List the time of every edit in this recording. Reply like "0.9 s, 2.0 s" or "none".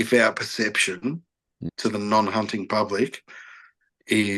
1.5 s